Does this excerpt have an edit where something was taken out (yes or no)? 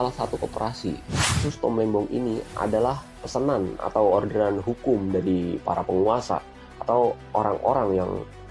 yes